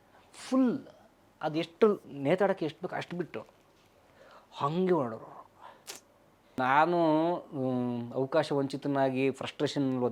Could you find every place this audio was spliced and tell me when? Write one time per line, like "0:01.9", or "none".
0:06.6